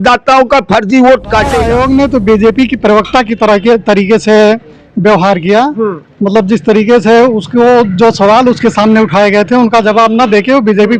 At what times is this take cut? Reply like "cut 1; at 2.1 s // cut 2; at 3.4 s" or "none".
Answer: cut 1; at 1.6 s